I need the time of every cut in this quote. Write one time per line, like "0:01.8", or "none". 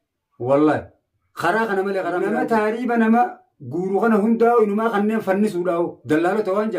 0:02.3